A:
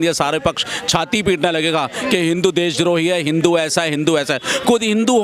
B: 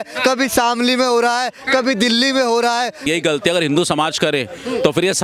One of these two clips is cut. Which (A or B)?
B